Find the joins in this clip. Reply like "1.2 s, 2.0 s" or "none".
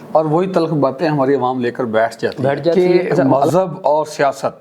3.4 s